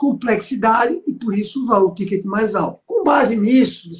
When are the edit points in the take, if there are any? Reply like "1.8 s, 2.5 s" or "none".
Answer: 2.8 s